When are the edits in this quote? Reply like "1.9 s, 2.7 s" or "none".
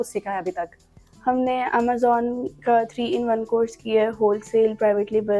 none